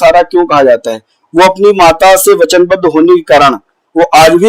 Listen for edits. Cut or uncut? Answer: uncut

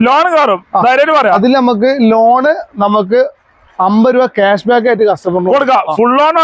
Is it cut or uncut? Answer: cut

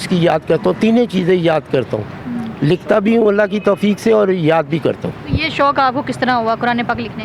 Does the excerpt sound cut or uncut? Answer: uncut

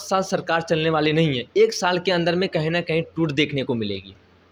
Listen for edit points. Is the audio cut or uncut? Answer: uncut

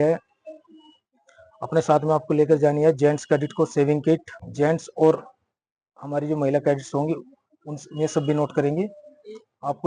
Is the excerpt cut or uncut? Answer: cut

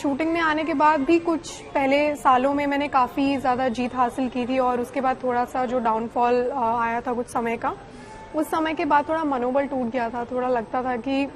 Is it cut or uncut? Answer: uncut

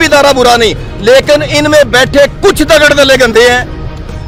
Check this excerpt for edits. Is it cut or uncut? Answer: uncut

